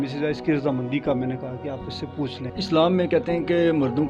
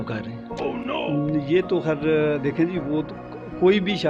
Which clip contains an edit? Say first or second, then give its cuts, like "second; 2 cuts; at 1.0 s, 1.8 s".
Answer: first; 1 cut; at 2.5 s